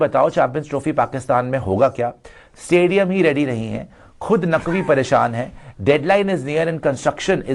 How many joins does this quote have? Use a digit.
0